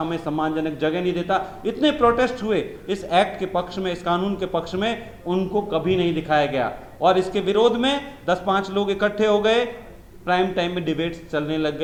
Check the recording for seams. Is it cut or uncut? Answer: uncut